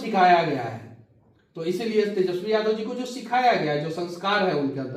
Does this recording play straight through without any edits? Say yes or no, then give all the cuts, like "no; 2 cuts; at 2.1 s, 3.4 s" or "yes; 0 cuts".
yes; 0 cuts